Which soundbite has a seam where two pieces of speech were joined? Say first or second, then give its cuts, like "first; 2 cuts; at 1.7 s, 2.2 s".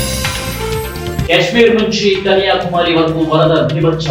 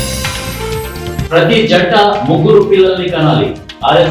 second; 1 cut; at 1.2 s